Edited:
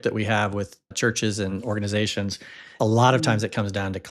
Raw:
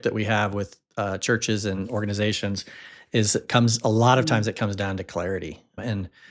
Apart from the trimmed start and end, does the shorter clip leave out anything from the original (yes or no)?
yes